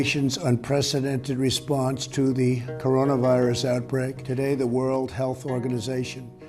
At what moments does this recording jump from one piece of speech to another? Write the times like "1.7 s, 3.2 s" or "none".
4.2 s